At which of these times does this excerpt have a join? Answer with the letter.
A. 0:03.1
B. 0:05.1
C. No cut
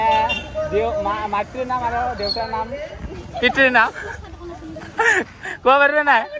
C